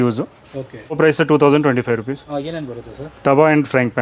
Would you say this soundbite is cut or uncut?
cut